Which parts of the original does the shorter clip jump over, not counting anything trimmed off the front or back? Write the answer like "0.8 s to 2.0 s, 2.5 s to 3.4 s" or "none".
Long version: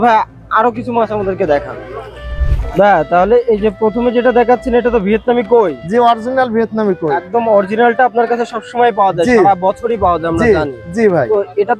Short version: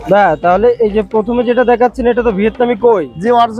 none

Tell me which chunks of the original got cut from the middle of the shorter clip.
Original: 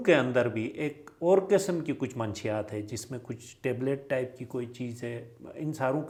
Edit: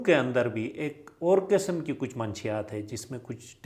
none

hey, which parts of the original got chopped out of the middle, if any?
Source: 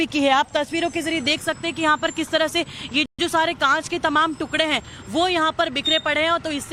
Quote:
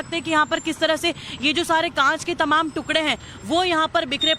3.0 s to 3.2 s

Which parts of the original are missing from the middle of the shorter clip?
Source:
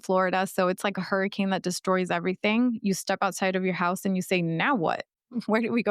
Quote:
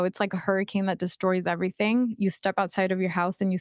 none

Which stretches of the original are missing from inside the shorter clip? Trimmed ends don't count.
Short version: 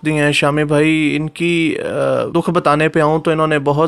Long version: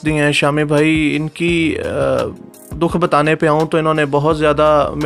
2.3 s to 2.7 s

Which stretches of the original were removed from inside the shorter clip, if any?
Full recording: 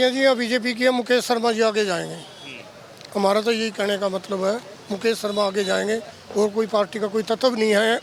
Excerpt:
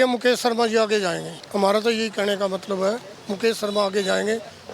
2.2 s to 2.9 s

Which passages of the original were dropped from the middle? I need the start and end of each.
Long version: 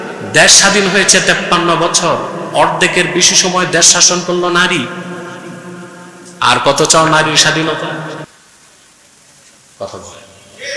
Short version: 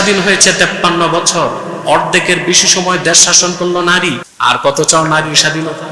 5.0 s to 6.3 s

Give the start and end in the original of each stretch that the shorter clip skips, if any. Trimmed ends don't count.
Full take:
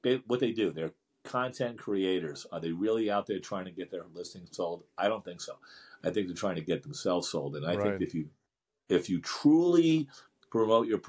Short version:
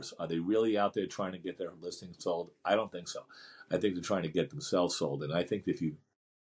none

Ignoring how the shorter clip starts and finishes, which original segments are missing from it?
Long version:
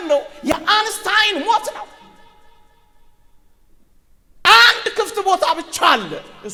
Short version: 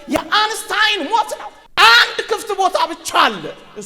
1.9 s to 4.2 s

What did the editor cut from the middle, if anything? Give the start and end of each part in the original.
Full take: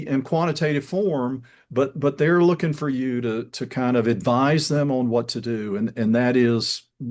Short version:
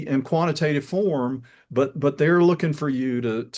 none

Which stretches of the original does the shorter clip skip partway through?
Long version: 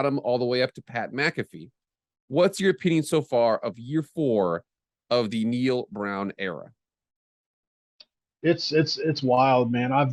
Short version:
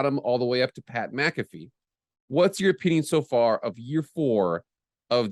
none

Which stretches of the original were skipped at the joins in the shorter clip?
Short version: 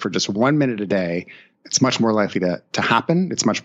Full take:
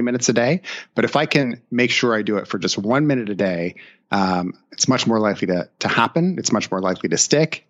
4.0 s to 4.6 s

